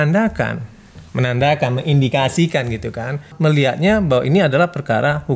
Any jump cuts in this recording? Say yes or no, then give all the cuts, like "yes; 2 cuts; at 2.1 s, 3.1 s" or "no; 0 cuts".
yes; 1 cut; at 3.3 s